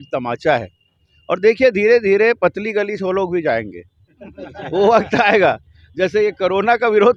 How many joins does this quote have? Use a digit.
0